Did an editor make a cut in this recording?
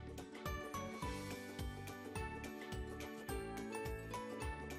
no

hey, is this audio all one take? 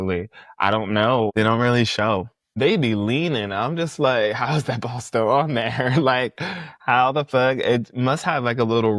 no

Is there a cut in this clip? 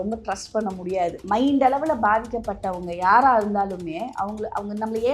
yes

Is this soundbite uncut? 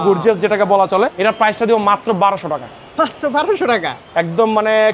no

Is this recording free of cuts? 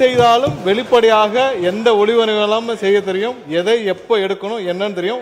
yes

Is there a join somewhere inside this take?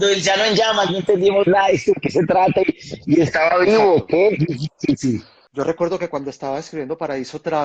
yes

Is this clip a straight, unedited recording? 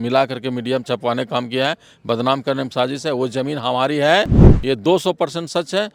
yes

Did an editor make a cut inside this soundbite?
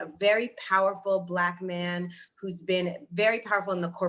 no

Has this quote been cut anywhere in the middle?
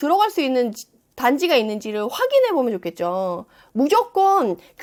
no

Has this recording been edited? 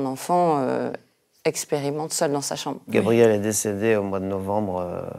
yes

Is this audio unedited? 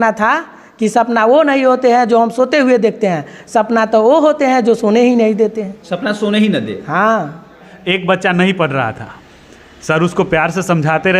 no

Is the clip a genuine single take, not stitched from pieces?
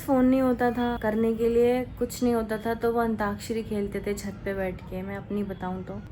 yes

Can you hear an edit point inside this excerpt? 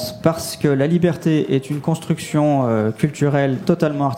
no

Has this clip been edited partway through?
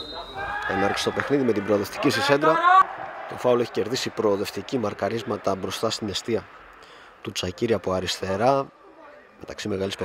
yes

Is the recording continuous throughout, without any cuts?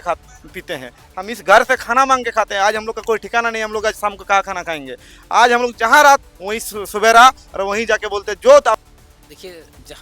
no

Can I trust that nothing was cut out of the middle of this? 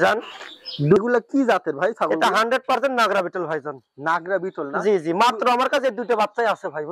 no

